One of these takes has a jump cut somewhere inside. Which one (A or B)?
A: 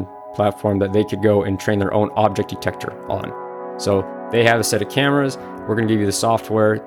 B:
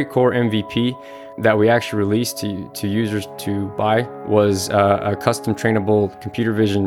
B